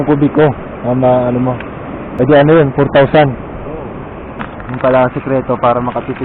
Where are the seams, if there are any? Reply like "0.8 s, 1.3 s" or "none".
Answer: 2.1 s, 4.6 s